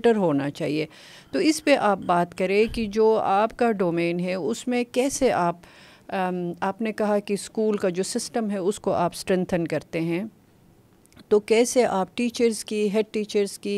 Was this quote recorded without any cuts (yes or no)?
yes